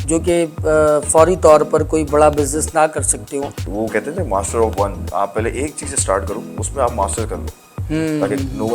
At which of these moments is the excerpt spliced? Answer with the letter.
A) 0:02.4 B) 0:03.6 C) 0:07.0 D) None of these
B